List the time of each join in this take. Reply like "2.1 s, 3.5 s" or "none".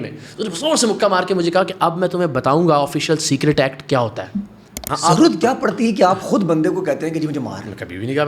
4.8 s